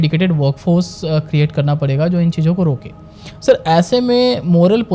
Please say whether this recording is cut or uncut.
uncut